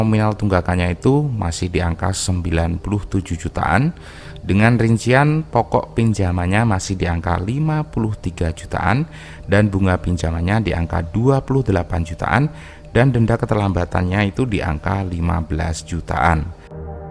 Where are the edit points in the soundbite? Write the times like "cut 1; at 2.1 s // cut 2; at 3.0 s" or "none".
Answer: none